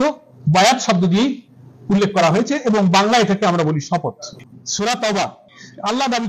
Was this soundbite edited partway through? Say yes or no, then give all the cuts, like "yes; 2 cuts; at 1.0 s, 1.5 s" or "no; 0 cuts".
yes; 1 cut; at 4.3 s